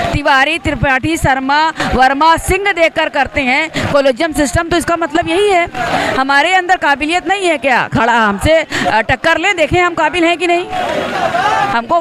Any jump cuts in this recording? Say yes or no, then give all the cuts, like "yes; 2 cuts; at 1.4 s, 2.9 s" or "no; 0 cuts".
no; 0 cuts